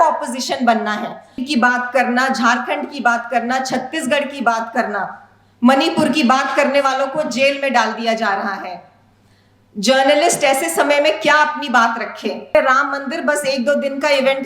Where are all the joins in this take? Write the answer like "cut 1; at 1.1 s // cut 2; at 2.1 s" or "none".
cut 1; at 1.4 s // cut 2; at 12.5 s